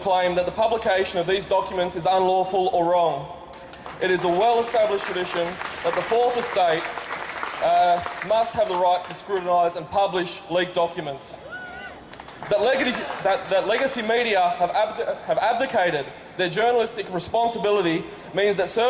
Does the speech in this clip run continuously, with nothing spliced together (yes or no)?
yes